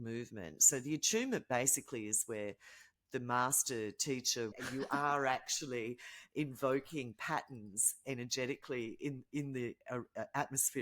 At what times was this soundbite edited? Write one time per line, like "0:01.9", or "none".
0:04.5